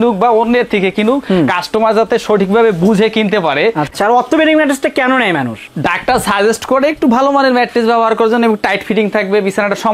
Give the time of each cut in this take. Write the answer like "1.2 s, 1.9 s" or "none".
3.9 s